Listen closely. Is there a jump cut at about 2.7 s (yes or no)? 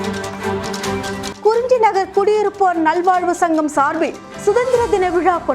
no